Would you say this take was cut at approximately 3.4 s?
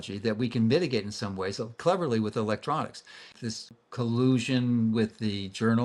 yes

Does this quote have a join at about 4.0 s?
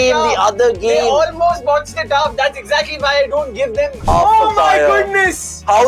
yes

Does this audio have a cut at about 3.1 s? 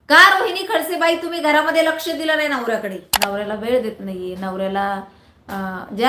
yes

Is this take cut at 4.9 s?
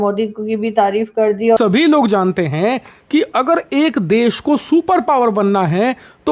no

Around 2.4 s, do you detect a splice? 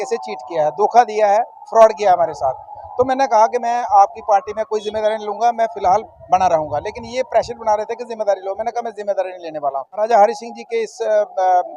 no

